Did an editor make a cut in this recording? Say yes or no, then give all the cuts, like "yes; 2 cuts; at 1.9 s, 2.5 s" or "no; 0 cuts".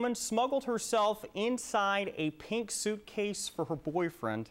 no; 0 cuts